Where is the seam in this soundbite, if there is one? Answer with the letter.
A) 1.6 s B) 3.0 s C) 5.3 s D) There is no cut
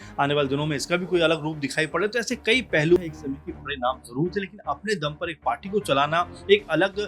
B